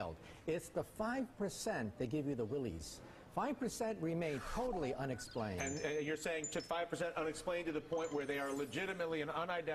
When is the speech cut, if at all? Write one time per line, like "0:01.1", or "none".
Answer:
none